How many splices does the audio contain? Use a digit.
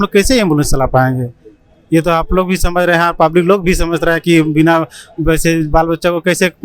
0